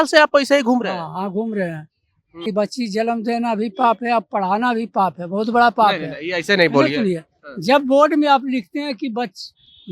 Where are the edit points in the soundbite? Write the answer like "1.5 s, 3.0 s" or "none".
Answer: 2.5 s